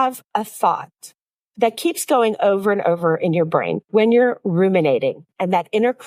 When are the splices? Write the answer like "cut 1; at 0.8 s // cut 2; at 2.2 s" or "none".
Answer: none